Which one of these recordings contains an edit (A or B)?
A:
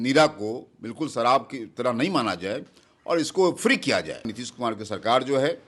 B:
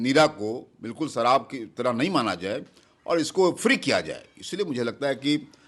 A